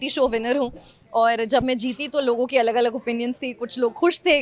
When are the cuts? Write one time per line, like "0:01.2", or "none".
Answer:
none